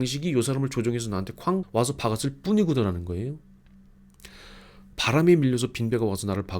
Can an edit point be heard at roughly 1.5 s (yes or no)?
no